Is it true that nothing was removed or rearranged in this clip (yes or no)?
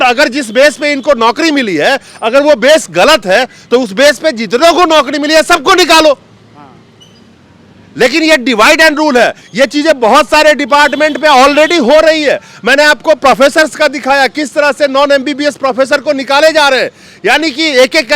yes